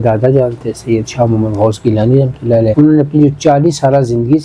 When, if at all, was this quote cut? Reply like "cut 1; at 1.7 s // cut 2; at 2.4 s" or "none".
cut 1; at 2.7 s